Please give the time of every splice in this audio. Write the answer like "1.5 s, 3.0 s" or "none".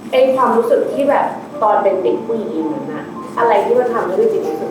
3.2 s